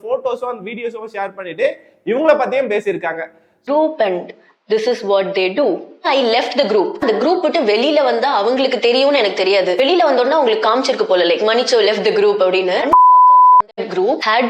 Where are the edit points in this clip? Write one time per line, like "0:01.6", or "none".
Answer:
none